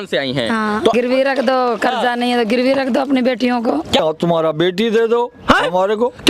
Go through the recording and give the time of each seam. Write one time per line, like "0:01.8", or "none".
0:00.9
0:04.0